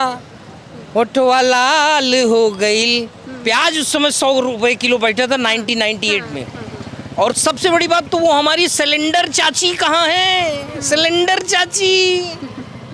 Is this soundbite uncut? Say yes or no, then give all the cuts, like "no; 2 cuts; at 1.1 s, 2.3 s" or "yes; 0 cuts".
yes; 0 cuts